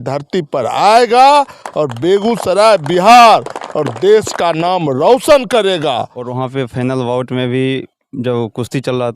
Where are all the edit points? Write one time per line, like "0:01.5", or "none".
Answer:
0:06.2